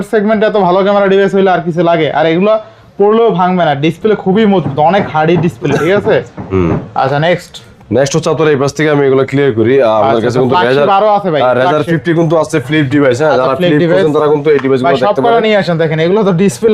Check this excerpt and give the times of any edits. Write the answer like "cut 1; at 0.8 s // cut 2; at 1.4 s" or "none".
none